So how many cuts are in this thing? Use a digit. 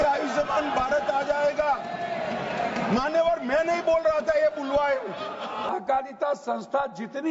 1